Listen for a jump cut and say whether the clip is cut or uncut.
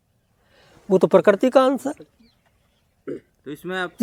uncut